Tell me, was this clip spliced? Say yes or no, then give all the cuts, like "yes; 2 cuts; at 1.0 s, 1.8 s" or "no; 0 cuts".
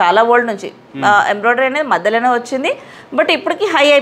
no; 0 cuts